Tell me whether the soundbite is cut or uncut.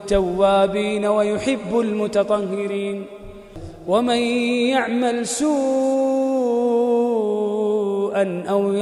cut